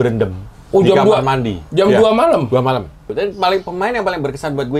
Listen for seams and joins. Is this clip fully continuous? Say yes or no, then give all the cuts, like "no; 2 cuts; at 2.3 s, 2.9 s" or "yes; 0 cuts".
no; 1 cut; at 3.1 s